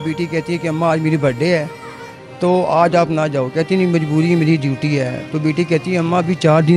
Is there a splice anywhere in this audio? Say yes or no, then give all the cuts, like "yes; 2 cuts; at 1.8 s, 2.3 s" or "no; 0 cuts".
no; 0 cuts